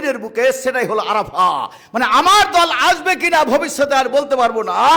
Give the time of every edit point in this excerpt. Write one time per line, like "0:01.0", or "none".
none